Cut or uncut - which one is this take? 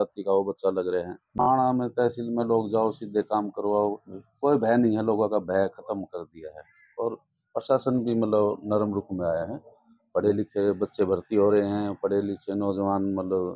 cut